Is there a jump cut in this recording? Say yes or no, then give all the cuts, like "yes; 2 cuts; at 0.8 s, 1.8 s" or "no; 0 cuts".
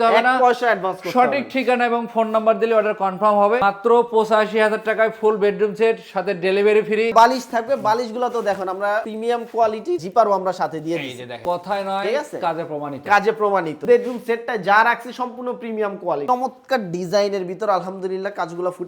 yes; 5 cuts; at 3.6 s, 7.1 s, 11.4 s, 13.8 s, 16.2 s